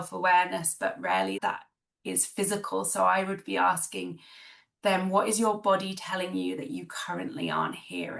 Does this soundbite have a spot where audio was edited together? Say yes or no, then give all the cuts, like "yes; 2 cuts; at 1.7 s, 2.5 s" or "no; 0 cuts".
yes; 1 cut; at 1.4 s